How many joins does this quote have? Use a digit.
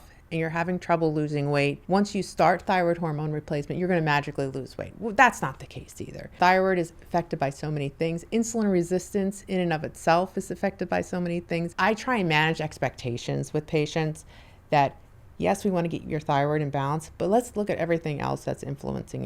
3